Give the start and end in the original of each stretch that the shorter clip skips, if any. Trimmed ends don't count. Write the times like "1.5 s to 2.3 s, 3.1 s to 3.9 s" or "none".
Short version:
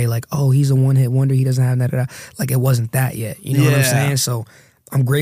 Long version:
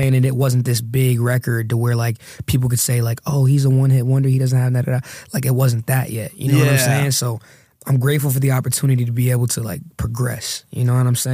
none